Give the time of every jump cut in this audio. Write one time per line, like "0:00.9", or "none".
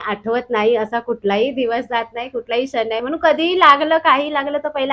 none